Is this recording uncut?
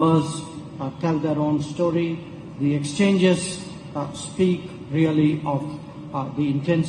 yes; 0 cuts

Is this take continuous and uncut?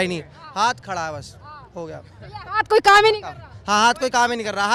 yes; 0 cuts

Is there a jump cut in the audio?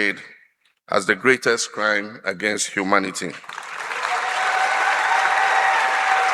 no; 0 cuts

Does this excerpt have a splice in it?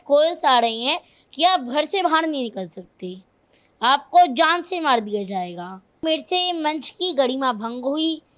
yes; 1 cut; at 5.9 s

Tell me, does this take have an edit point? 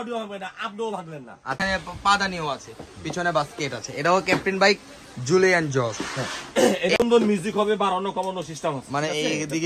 yes; 2 cuts; at 1.6 s, 7.0 s

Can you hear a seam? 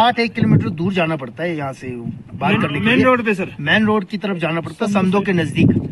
no; 0 cuts

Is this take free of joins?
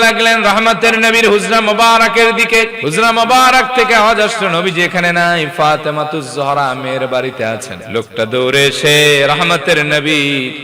no; 2 cuts; at 2.8 s, 7.8 s

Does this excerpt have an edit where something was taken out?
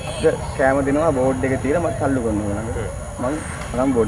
no; 0 cuts

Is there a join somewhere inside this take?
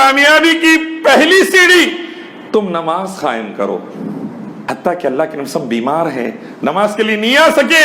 yes; 1 cut; at 4.5 s

